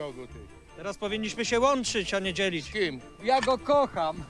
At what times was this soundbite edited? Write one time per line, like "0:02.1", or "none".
0:03.1